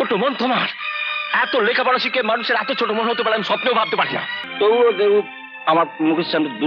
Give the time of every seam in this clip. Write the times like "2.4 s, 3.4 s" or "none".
4.4 s